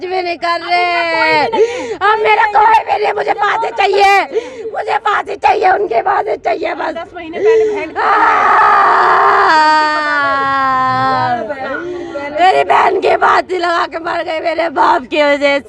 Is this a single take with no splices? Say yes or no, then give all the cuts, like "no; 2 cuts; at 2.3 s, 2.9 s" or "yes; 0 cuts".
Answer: yes; 0 cuts